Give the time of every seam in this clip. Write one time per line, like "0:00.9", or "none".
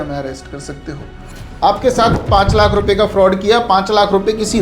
0:01.4

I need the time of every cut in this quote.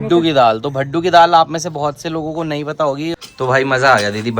0:03.1

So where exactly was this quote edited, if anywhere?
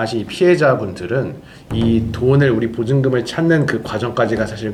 none

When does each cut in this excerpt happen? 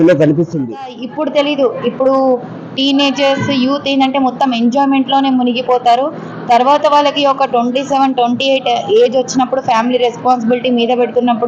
0:01.0

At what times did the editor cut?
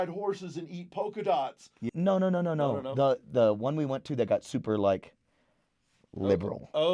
0:01.9

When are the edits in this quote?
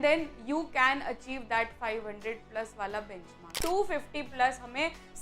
0:03.6

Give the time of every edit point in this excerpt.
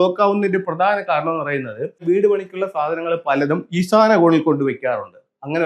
0:02.0

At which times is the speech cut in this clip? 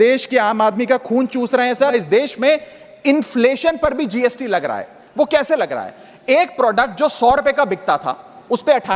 0:01.9

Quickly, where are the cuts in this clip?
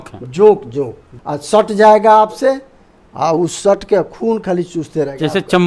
0:01.0

